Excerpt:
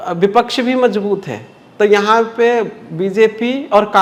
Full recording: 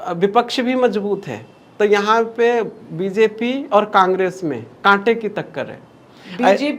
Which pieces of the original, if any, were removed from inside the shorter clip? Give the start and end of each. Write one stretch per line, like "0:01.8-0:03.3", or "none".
none